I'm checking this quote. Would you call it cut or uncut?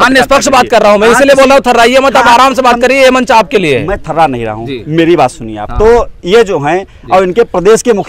uncut